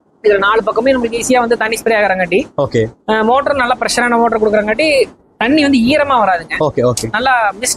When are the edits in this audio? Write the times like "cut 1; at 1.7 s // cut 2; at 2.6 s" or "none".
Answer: none